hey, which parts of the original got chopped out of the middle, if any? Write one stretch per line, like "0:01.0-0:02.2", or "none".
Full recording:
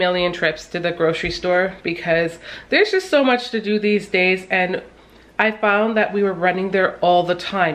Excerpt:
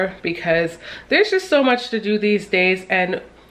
none